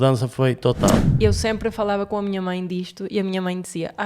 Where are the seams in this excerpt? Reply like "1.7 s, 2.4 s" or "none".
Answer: 1.1 s